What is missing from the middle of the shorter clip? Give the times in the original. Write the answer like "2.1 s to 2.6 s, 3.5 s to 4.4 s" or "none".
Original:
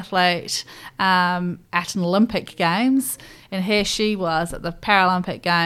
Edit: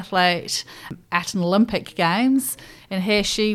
0.9 s to 1.5 s

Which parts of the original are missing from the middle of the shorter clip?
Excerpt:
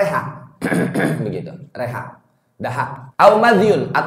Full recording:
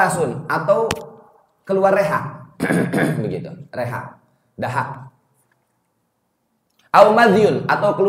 5.0 s to 6.8 s

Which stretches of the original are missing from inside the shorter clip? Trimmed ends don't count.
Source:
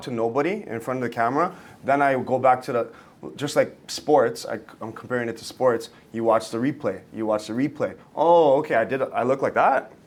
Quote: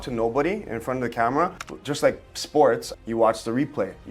1.7 s to 3.2 s, 4.5 s to 6.0 s

